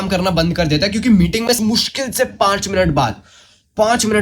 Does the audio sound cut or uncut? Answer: cut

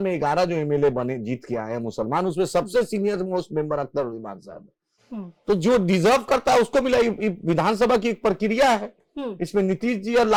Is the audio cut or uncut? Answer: uncut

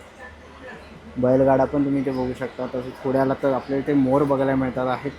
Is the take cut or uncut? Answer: uncut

